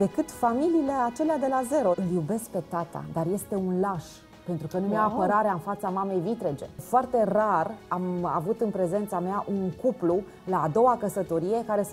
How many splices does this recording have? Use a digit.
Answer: 2